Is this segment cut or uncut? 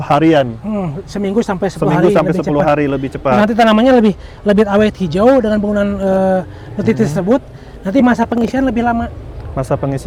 uncut